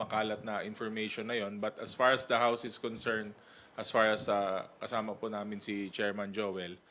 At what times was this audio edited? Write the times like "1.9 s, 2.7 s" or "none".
none